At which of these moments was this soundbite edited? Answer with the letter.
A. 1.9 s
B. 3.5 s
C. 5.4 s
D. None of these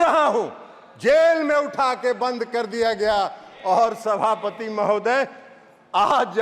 D